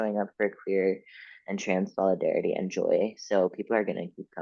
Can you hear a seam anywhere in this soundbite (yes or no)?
no